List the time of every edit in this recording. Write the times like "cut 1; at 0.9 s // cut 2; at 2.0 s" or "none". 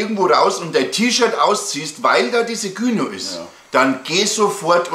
none